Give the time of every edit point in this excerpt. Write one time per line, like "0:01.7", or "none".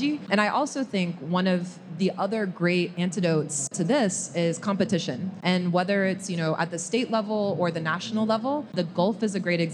none

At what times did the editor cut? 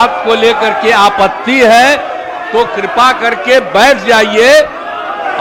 none

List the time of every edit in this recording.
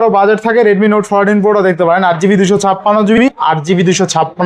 0:03.2

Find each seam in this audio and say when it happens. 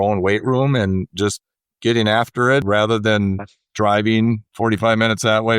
0:01.1
0:02.6
0:04.5

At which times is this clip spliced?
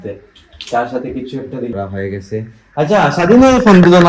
0:01.7

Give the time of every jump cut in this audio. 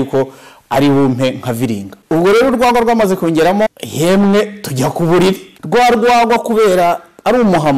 0:01.9
0:03.7
0:05.5

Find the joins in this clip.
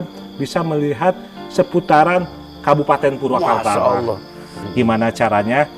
0:04.6

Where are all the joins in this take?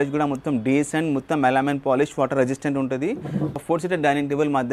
0:03.6

